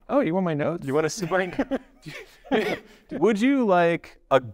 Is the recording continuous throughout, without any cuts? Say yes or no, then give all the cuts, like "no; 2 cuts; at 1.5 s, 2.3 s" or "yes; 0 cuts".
no; 1 cut; at 2.9 s